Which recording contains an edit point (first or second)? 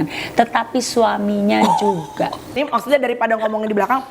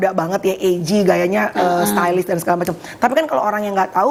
first